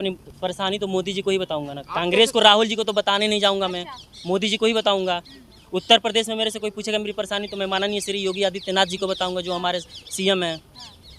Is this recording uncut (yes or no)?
yes